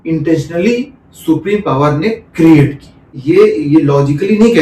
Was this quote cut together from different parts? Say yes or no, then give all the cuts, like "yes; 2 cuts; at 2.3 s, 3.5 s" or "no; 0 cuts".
yes; 1 cut; at 3.1 s